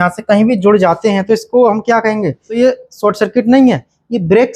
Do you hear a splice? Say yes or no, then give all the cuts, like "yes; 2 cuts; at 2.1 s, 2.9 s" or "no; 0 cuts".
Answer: yes; 1 cut; at 2.5 s